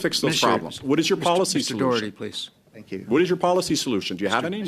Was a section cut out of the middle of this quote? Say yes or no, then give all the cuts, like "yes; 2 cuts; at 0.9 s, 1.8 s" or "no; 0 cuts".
no; 0 cuts